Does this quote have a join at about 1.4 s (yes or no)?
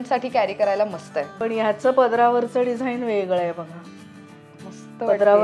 yes